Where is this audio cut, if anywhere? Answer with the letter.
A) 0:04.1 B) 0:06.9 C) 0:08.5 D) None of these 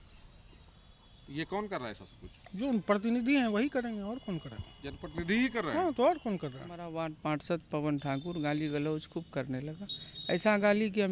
B